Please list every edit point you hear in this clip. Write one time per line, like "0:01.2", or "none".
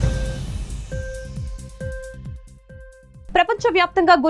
0:01.3